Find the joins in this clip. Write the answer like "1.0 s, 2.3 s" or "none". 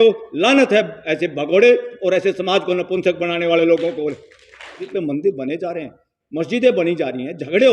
4.9 s